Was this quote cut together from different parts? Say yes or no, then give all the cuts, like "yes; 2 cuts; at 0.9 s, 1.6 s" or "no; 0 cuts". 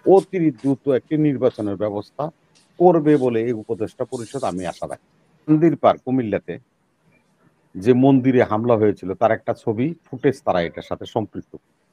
yes; 1 cut; at 5.5 s